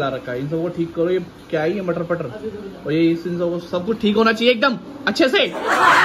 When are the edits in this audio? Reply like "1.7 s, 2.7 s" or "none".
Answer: none

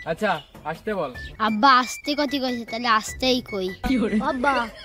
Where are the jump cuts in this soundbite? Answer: 1.2 s

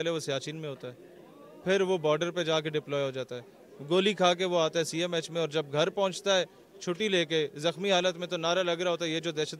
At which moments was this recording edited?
none

